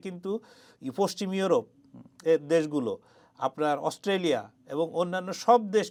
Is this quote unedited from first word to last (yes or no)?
yes